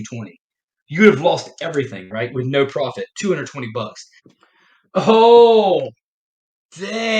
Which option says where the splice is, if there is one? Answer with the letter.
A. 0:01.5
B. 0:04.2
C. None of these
B